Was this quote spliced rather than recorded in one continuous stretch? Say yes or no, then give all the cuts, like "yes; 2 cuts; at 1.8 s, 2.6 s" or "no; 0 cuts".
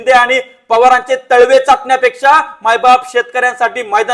no; 0 cuts